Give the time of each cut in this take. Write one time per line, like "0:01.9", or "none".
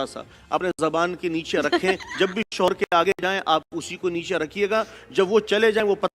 none

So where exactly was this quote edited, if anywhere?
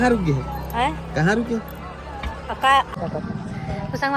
0:03.0

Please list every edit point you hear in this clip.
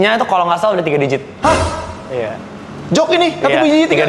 none

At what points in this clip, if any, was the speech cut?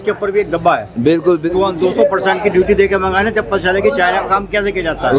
0:01.4

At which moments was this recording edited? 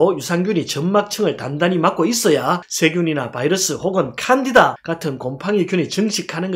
none

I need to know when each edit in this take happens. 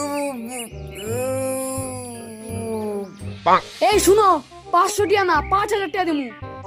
none

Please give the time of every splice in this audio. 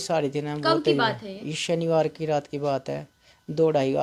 none

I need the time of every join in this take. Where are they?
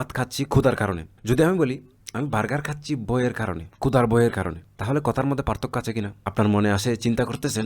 0:01.1
0:03.7
0:04.7
0:06.2

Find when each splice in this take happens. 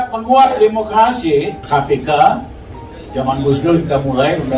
0:01.6

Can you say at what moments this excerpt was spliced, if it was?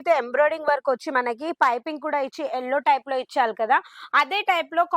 none

